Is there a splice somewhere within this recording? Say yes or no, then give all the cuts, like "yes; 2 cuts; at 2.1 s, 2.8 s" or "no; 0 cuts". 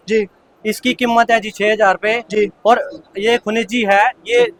no; 0 cuts